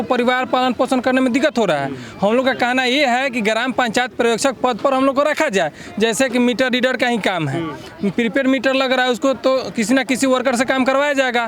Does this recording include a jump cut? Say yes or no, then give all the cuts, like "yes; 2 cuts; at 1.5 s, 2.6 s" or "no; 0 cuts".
no; 0 cuts